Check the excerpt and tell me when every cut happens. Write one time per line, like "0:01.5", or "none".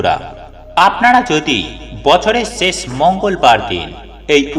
none